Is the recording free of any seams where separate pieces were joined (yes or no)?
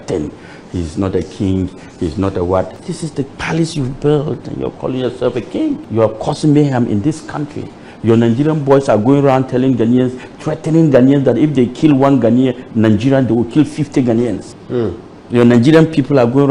no